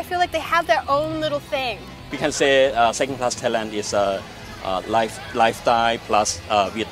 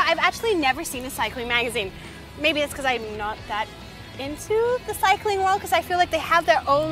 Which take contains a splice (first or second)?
first